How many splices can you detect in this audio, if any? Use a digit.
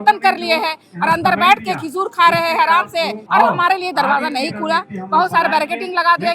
1